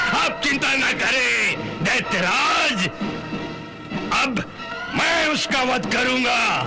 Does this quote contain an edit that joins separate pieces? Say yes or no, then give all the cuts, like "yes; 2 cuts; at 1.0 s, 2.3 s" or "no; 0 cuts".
no; 0 cuts